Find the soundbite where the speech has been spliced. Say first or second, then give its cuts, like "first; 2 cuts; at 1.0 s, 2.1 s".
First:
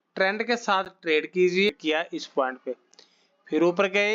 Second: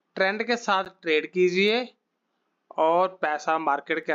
first; 1 cut; at 1.7 s